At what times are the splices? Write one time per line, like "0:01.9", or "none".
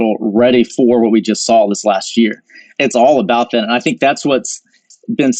0:02.7